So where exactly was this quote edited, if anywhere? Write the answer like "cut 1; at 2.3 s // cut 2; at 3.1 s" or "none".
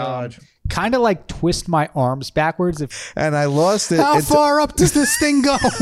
cut 1; at 2.9 s